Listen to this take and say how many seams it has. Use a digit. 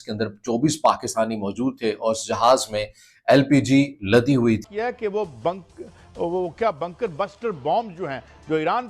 1